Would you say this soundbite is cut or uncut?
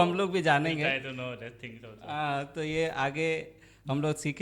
uncut